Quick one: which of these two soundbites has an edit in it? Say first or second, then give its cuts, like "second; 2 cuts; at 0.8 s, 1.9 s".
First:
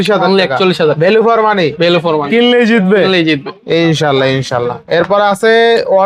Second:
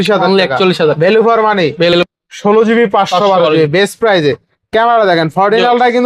second; 1 cut; at 2.0 s